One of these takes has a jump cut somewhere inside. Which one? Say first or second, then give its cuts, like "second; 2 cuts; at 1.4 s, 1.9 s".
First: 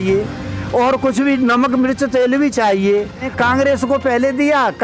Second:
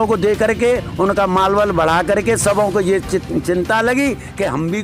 first; 1 cut; at 3.3 s